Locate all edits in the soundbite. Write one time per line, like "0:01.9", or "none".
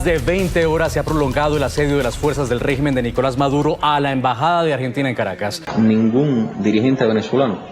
0:05.6